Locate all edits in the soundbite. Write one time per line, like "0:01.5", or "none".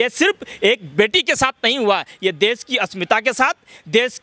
none